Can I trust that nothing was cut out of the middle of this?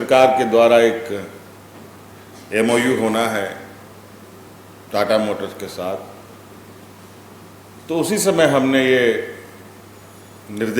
yes; 0 cuts

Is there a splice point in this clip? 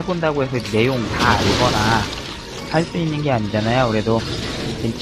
yes; 1 cut; at 3.7 s

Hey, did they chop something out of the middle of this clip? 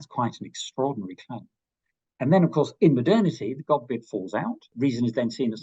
yes; 1 cut; at 4.7 s

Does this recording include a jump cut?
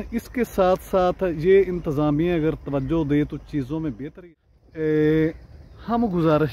yes; 1 cut; at 4.2 s

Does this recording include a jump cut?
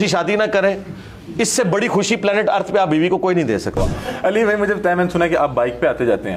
yes; 1 cut; at 3.8 s

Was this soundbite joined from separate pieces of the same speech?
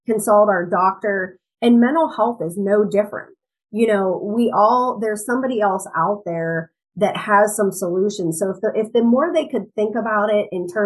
no; 0 cuts

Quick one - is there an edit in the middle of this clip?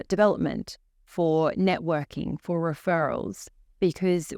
no; 0 cuts

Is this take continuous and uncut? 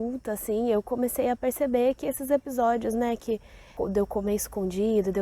no; 1 cut; at 3.7 s

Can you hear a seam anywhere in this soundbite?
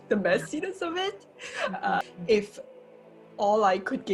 yes; 1 cut; at 2.0 s

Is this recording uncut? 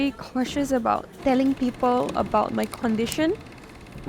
no; 1 cut; at 1.1 s

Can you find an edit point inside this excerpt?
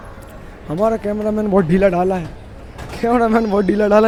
no; 0 cuts

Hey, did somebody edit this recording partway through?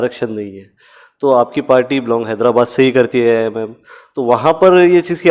no; 0 cuts

